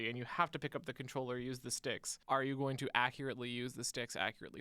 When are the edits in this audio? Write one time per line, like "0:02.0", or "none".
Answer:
0:02.1

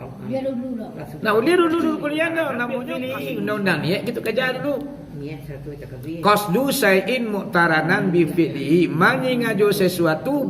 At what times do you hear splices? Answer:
0:02.8

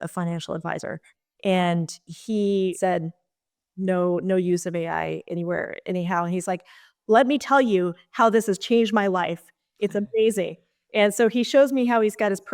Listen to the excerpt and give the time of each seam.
0:02.7

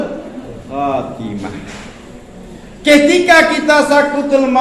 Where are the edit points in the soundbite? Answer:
none

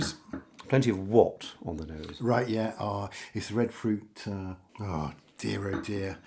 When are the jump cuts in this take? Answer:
0:04.7

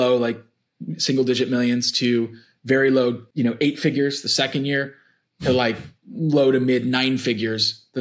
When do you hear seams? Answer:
0:03.3

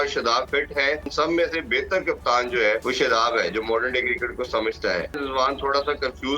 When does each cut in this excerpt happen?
0:01.1
0:02.8
0:05.2

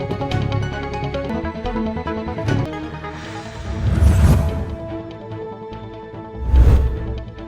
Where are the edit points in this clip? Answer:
0:01.2

